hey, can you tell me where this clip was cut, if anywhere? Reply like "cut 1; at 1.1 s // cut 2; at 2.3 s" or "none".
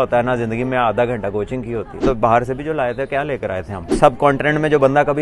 cut 1; at 2.0 s // cut 2; at 3.9 s